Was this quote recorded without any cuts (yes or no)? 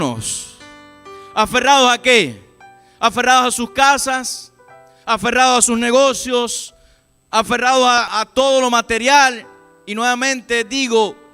no